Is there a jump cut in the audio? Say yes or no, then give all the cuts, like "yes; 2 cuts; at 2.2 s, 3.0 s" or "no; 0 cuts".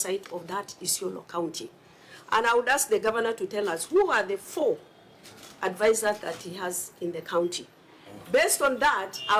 no; 0 cuts